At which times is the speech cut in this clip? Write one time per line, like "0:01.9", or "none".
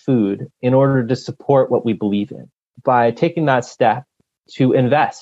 0:02.4
0:04.2